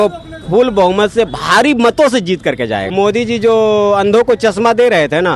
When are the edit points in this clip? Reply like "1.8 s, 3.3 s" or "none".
2.9 s